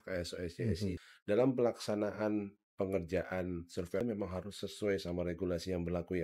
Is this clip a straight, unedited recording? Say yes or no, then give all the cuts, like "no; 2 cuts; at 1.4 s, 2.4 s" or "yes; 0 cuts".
no; 2 cuts; at 1.0 s, 4.0 s